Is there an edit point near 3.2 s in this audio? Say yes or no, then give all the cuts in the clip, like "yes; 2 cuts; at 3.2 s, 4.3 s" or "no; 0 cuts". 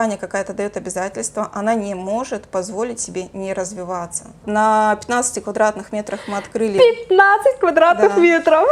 no; 1 cut; at 4.4 s